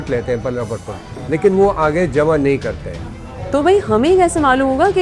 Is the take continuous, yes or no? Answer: yes